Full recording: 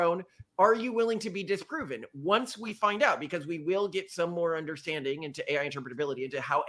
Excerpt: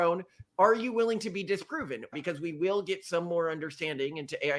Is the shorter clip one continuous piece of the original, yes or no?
no